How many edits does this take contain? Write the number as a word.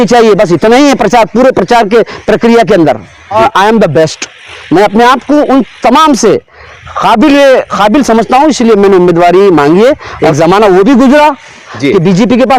two